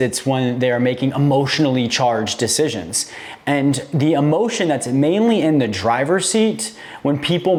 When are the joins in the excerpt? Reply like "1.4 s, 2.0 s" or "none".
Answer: none